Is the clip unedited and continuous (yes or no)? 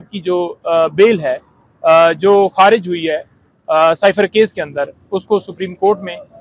yes